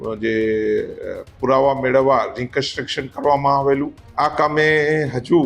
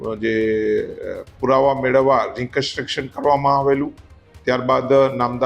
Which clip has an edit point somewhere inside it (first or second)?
first